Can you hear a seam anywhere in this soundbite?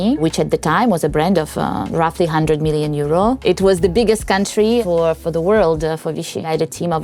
no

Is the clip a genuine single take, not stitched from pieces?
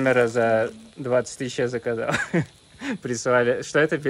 yes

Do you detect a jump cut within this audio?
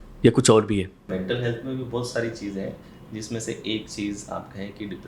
yes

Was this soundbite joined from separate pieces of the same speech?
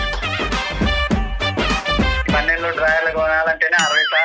yes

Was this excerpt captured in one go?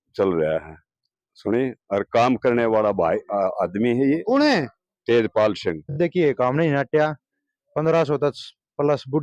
no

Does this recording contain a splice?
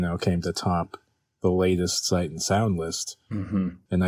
no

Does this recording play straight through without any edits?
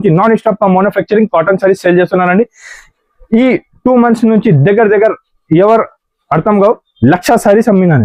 yes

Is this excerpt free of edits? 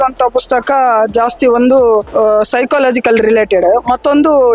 no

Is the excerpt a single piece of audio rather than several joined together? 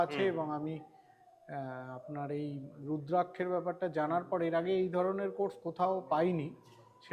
yes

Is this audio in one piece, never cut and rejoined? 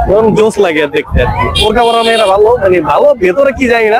yes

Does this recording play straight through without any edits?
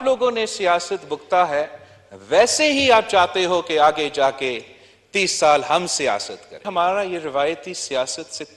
no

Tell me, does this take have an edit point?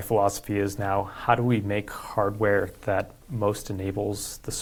no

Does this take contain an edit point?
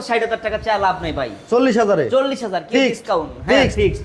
no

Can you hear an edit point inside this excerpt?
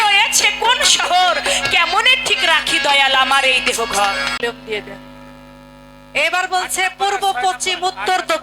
yes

